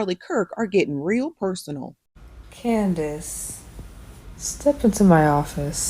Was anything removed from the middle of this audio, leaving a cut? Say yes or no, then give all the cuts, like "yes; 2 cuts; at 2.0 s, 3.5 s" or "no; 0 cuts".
yes; 1 cut; at 2.1 s